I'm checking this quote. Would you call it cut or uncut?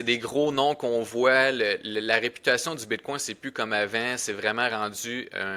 uncut